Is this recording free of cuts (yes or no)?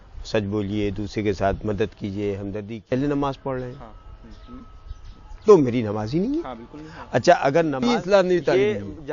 no